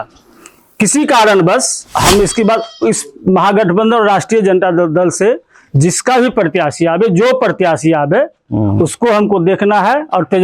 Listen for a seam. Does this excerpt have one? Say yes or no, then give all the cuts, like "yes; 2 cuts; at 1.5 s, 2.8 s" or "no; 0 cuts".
yes; 1 cut; at 1.8 s